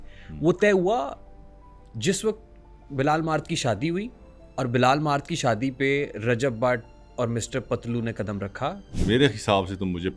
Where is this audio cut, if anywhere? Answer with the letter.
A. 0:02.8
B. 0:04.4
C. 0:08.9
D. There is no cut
C